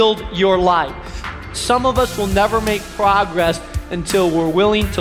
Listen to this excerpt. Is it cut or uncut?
cut